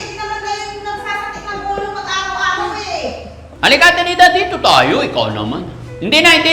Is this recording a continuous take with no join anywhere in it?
no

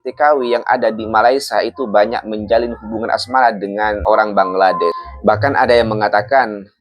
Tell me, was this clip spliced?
yes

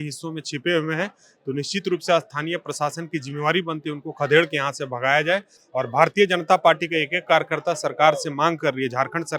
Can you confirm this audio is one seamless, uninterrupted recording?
yes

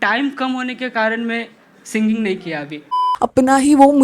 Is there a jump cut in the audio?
yes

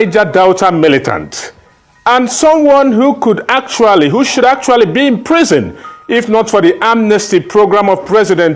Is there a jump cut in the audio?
no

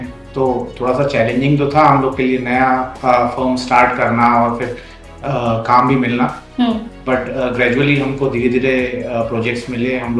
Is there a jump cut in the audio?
no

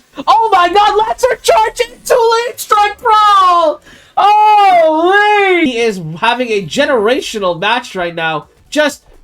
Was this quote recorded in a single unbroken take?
no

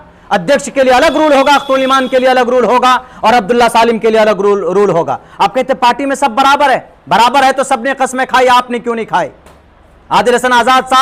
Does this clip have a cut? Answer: no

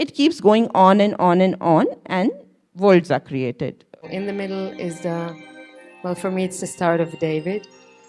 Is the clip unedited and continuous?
no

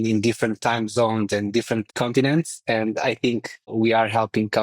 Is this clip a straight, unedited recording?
no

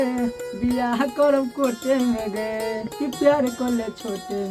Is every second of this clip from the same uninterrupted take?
yes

